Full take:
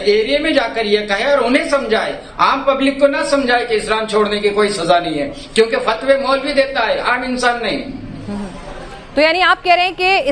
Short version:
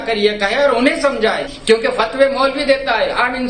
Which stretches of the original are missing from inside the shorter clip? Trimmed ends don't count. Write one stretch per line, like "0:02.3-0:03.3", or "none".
0:02.2-0:05.4